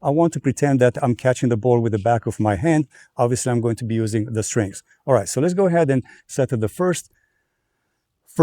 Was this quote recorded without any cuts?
yes; 0 cuts

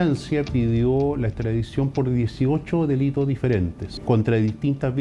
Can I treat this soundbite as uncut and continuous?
no; 1 cut; at 3.9 s

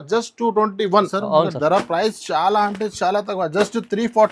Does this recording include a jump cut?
yes; 1 cut; at 1.1 s

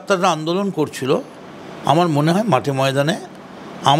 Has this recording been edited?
no; 0 cuts

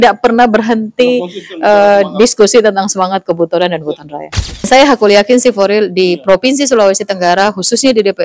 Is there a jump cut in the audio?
yes; 1 cut; at 4.7 s

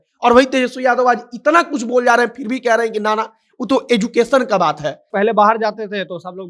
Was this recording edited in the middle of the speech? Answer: yes; 1 cut; at 5.1 s

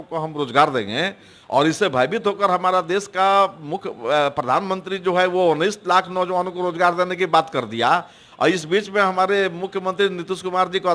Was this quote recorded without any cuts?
yes; 0 cuts

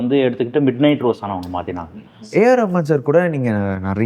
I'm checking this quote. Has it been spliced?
yes; 1 cut; at 2.2 s

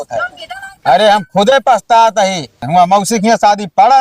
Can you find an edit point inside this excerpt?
yes; 1 cut; at 2.6 s

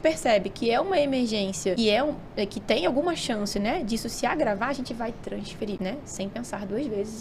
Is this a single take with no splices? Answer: no; 2 cuts; at 1.8 s, 5.8 s

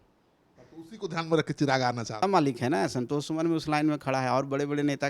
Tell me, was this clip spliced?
yes; 1 cut; at 2.2 s

